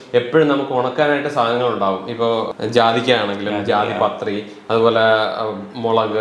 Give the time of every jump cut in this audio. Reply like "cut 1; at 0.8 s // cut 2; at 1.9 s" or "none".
cut 1; at 2.5 s